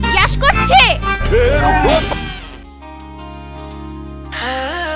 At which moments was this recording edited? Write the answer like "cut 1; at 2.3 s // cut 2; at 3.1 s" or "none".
none